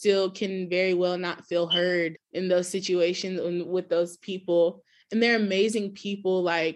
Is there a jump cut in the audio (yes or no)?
yes